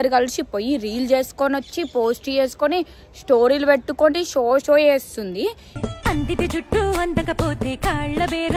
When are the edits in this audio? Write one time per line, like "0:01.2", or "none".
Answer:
none